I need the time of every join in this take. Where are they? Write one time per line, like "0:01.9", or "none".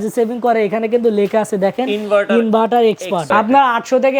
0:03.2